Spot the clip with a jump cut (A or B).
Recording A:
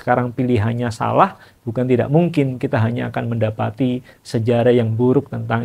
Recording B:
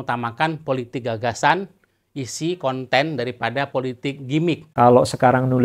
B